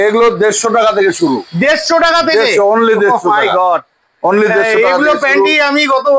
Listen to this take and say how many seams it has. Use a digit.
0